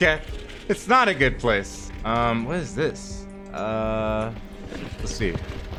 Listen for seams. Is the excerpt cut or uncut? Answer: uncut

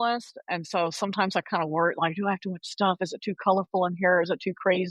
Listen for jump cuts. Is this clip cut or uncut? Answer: uncut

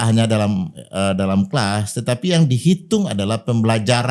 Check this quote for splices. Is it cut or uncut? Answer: uncut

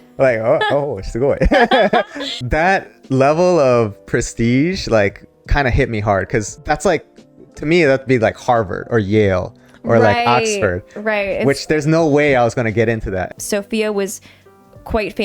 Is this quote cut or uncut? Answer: cut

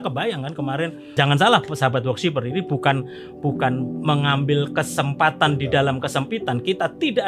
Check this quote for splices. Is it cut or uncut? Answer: cut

